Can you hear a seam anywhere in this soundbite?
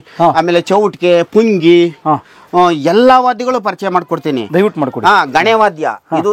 no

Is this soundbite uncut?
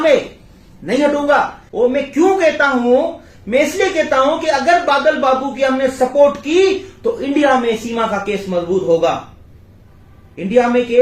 no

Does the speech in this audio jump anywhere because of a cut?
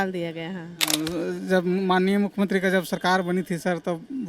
yes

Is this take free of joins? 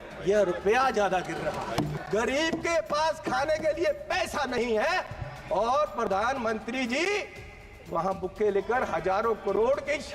no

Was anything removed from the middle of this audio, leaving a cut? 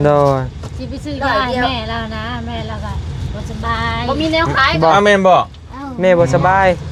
no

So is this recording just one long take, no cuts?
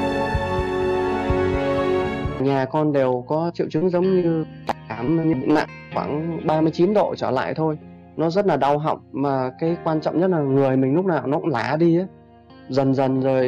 no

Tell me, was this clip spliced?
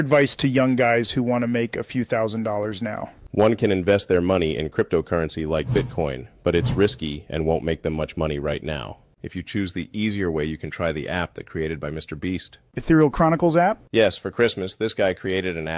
no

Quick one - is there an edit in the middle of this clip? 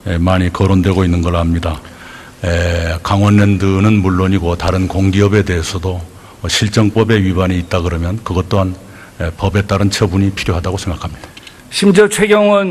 no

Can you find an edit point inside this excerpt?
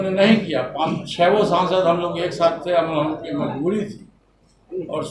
no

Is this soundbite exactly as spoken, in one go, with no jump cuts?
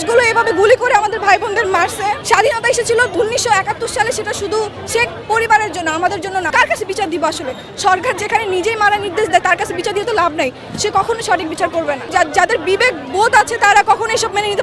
no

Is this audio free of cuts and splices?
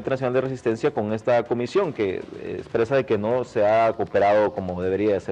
no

